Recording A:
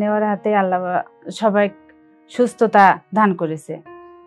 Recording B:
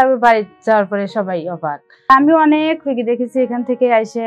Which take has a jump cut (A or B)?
B